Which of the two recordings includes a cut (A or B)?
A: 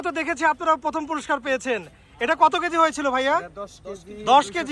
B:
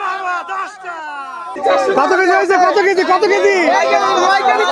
B